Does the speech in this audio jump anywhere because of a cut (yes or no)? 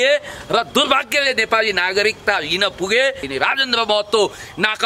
yes